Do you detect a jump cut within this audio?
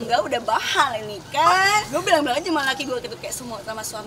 yes; 1 cut; at 1.5 s

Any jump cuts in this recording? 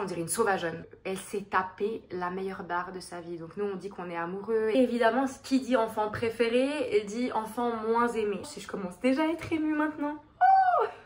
yes; 3 cuts; at 0.9 s, 4.8 s, 8.4 s

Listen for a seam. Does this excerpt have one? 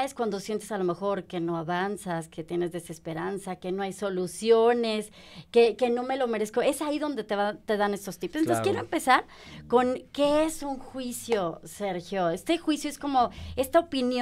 no; 0 cuts

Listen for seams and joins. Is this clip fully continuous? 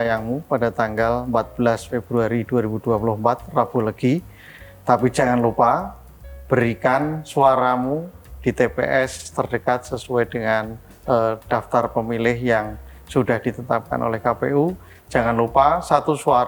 yes; 0 cuts

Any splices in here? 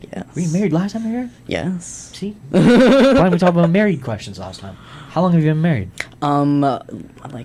no; 0 cuts

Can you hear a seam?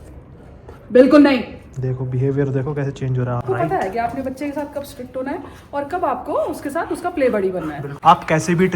yes; 2 cuts; at 3.4 s, 7.8 s

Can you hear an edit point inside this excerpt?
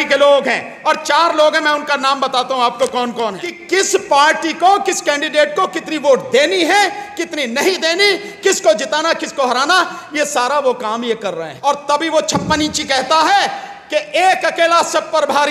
yes; 2 cuts; at 3.5 s, 11.5 s

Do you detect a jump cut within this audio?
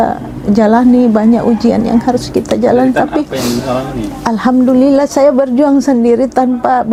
no; 0 cuts

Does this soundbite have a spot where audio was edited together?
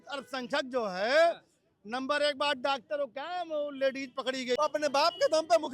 yes; 1 cut; at 4.6 s

